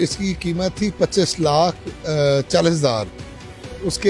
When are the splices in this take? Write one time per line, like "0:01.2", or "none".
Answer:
none

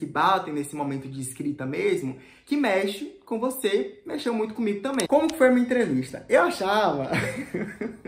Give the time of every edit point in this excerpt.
0:05.1

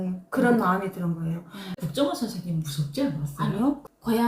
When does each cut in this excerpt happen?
0:01.8

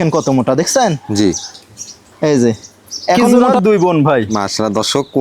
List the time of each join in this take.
0:03.4

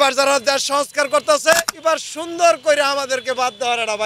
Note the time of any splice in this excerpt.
0:01.7

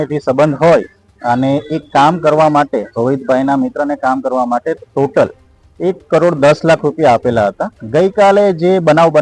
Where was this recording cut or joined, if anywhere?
0:07.7

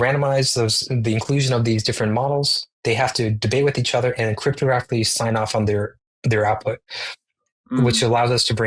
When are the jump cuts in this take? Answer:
none

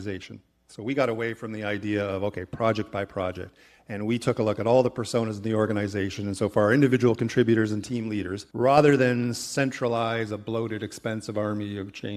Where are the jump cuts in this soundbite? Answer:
0:08.4

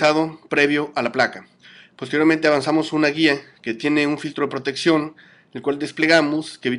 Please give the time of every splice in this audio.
0:03.3

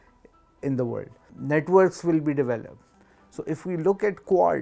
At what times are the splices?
0:01.3

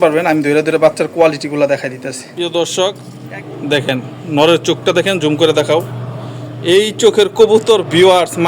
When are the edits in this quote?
0:02.3

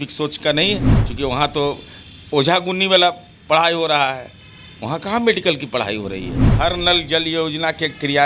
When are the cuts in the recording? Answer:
0:01.0
0:06.4

